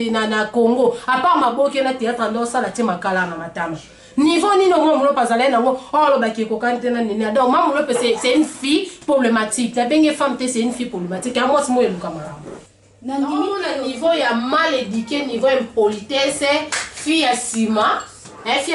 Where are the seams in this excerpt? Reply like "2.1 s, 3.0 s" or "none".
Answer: 13.6 s